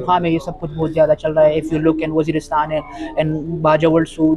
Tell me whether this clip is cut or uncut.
uncut